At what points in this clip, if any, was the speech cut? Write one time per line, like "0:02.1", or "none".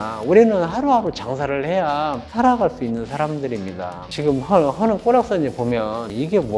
0:02.2
0:04.0